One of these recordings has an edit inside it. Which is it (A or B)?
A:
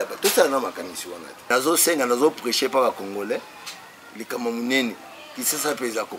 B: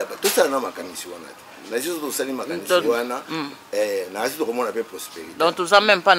A